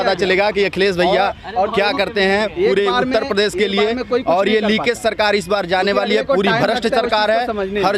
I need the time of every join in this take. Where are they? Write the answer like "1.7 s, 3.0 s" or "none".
none